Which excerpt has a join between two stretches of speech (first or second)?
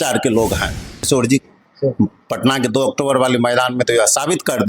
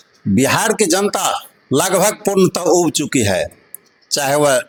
first